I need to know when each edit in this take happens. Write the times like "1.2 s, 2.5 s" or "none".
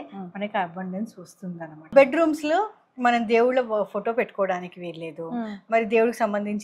1.8 s